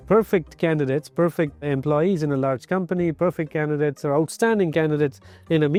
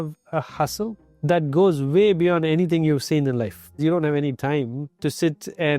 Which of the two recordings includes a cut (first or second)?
second